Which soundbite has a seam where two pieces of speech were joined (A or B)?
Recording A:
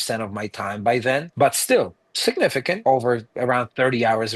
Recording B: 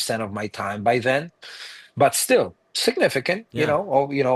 A